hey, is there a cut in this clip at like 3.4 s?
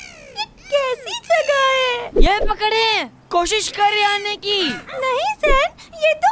no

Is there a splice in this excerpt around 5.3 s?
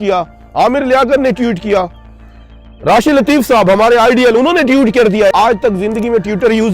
yes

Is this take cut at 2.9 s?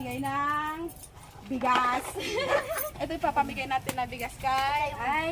yes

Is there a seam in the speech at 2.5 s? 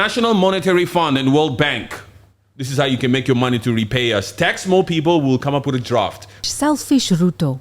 no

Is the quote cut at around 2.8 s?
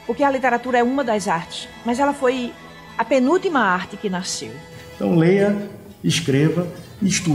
no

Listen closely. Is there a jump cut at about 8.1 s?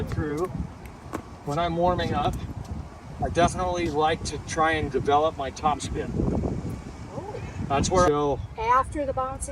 yes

